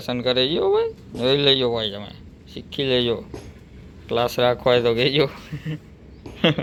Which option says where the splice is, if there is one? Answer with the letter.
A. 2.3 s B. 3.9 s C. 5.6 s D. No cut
D